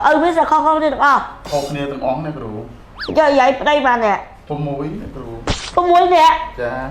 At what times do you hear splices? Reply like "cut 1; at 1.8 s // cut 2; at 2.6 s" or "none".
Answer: none